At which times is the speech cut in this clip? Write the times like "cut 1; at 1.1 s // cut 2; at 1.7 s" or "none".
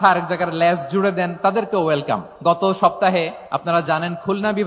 cut 1; at 2.3 s // cut 2; at 3.4 s